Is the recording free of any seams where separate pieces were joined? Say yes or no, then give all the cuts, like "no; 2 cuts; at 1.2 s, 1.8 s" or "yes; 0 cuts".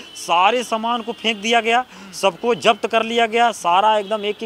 yes; 0 cuts